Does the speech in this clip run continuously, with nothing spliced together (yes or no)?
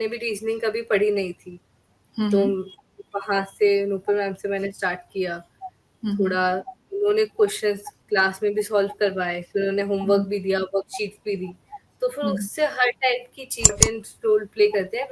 no